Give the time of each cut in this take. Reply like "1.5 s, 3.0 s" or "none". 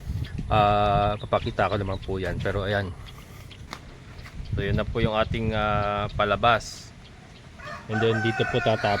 3.8 s